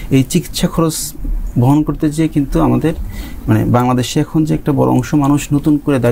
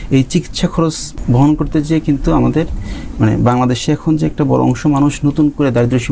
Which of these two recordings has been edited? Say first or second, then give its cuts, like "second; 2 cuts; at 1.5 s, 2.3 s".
second; 1 cut; at 1.1 s